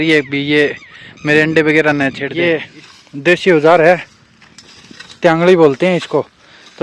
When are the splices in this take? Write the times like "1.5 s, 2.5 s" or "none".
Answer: 2.2 s